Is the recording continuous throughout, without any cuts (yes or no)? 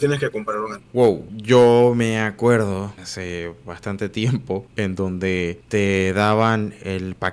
no